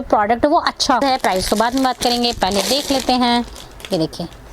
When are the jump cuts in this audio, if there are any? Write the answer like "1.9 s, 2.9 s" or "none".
1.0 s